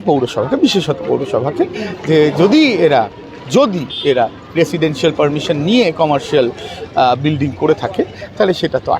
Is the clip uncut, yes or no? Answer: yes